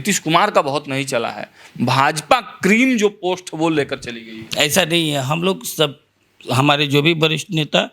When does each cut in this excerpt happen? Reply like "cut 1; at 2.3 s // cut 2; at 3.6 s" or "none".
none